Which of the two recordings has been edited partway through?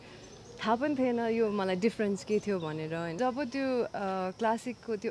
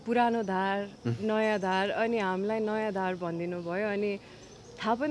first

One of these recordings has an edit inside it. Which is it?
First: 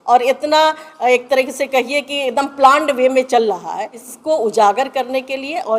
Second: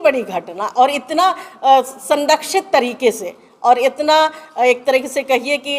first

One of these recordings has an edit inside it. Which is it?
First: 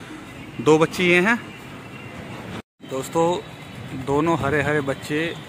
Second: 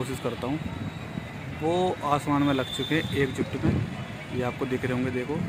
first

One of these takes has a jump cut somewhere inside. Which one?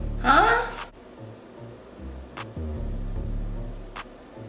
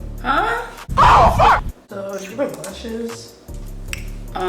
second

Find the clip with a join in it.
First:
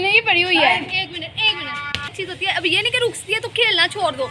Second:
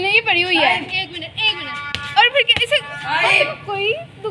first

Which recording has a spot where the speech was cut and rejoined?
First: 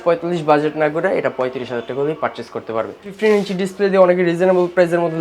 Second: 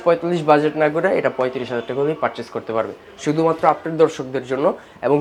first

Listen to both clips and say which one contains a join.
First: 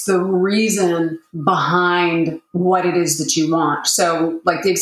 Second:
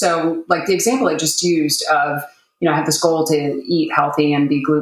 first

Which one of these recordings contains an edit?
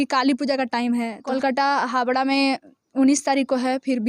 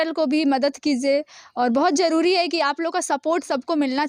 first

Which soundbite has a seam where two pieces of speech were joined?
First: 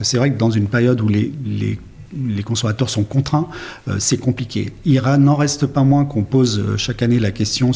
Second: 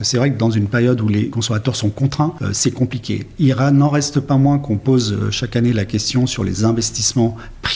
second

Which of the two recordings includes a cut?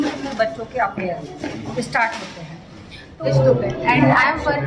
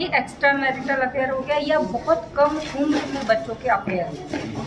first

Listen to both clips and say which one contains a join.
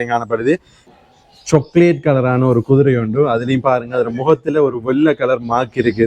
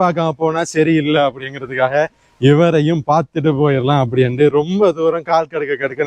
first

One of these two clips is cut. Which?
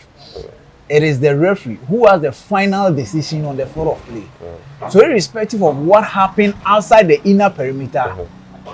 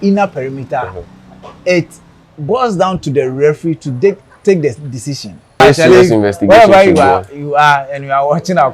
second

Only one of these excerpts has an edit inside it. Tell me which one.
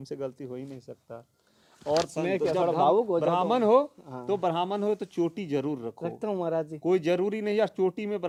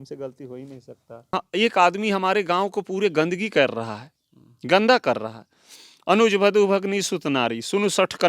second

